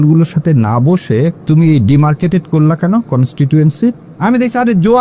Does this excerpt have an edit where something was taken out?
yes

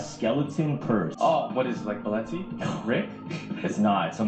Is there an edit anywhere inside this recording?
yes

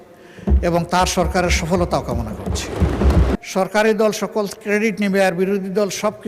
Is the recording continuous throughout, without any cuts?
no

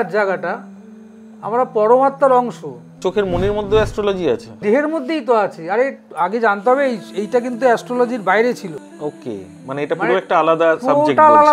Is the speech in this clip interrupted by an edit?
yes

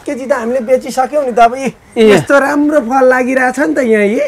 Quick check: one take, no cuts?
yes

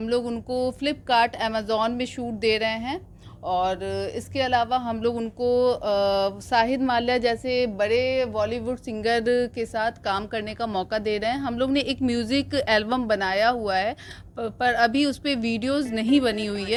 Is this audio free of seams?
yes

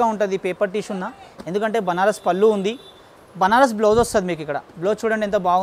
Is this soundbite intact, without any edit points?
yes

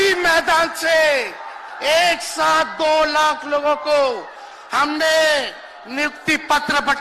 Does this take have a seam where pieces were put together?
no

